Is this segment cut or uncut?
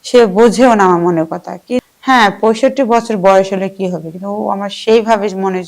cut